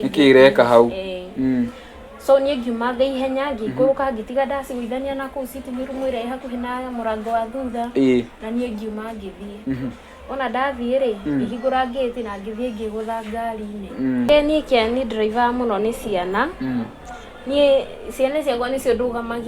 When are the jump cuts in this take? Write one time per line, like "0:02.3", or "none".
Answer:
0:14.3

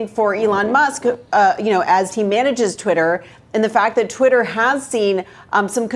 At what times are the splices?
none

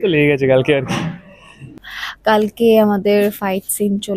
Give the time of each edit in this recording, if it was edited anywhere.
0:01.7

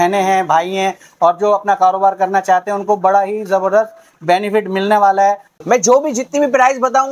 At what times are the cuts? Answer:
0:05.5

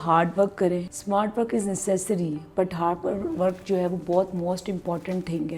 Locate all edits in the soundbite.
0:00.9

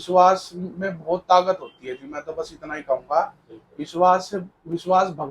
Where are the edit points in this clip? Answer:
none

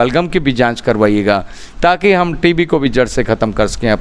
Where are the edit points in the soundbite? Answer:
none

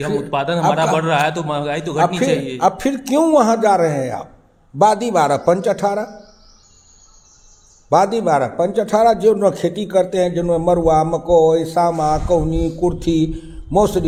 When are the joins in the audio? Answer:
none

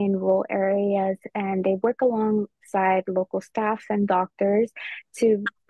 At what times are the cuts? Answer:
none

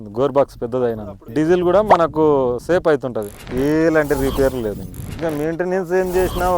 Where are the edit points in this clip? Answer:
0:03.4
0:05.1

